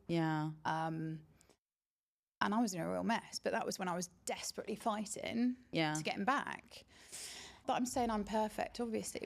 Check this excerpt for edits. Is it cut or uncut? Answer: cut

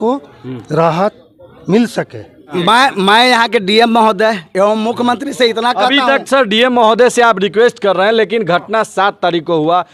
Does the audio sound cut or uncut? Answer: uncut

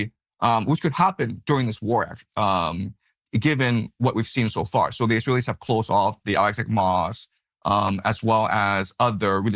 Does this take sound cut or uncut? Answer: uncut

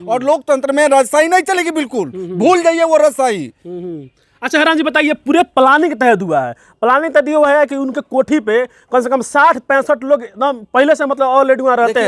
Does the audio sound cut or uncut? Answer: uncut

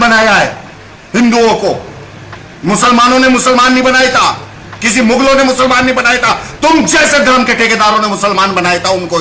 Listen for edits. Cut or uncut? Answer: uncut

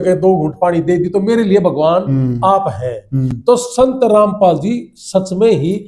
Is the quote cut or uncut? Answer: uncut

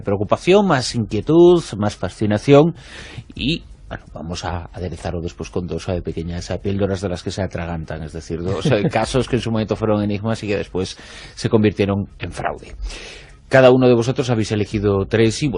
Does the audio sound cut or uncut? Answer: cut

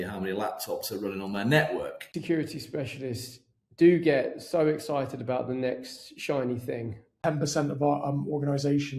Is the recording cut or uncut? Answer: cut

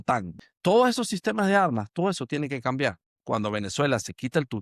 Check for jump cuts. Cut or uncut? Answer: cut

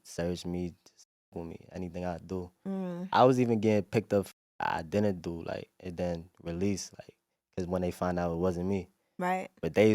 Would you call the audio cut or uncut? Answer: uncut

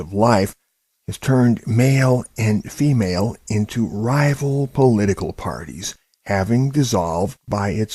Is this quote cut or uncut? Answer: cut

